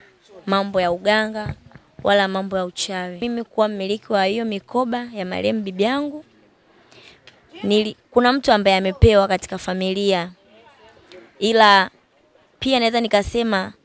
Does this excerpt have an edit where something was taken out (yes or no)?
yes